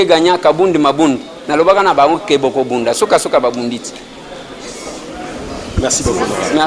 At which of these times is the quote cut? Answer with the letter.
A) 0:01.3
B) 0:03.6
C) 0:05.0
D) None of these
D